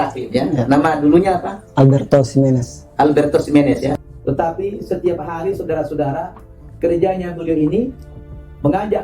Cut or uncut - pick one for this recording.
cut